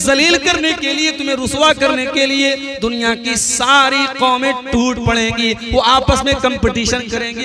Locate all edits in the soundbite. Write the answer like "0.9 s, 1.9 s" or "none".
none